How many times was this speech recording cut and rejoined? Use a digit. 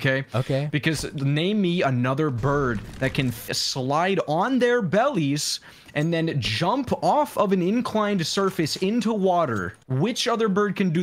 1